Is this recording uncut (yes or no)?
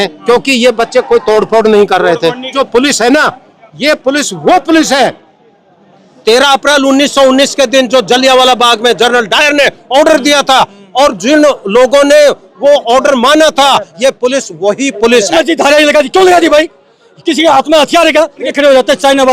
no